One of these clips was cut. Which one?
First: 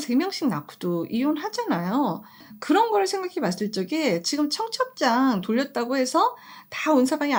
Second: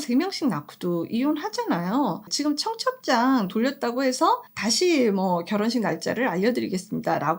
second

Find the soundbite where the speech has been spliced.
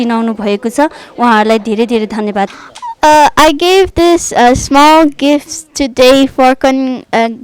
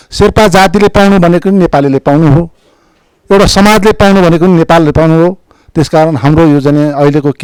first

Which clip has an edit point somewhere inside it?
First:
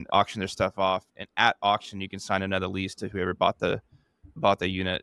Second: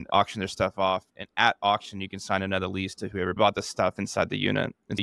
second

